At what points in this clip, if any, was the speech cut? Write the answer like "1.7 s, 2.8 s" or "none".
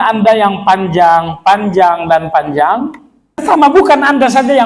3.4 s